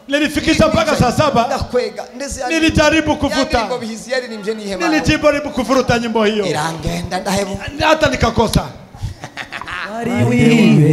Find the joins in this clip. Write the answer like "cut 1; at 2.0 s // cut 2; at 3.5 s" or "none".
cut 1; at 10.0 s